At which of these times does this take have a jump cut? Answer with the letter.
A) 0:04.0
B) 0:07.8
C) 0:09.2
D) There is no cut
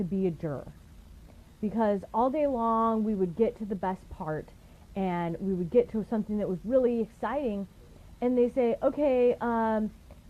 B